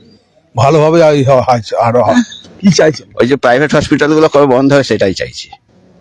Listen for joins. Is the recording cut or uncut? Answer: cut